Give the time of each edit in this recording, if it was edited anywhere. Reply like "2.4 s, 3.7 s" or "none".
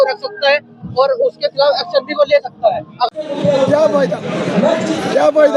3.2 s